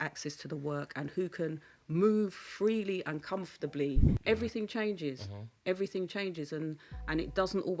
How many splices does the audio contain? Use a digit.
1